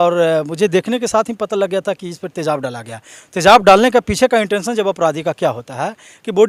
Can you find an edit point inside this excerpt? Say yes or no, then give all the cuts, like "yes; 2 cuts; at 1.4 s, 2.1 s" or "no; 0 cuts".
no; 0 cuts